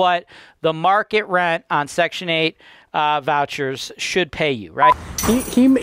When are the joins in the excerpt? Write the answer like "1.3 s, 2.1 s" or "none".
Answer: 4.8 s